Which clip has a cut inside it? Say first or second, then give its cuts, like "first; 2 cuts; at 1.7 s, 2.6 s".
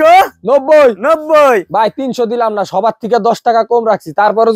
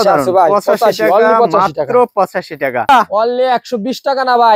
second; 1 cut; at 2.9 s